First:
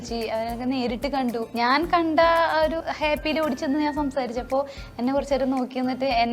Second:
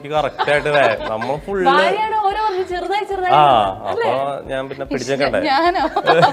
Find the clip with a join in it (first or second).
first